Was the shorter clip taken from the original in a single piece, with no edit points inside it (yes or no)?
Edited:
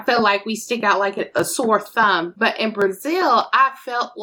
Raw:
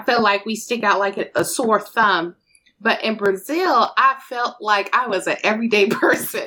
no